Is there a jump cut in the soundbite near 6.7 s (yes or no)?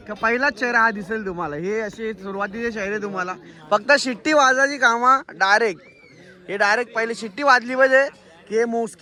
no